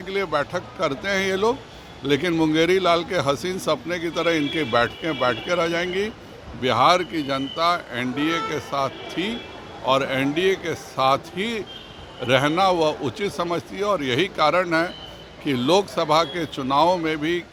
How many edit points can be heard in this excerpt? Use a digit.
0